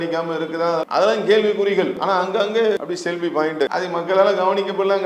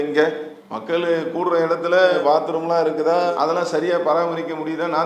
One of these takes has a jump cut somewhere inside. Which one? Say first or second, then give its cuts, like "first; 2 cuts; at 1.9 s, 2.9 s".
first; 4 cuts; at 0.8 s, 1.9 s, 2.8 s, 3.7 s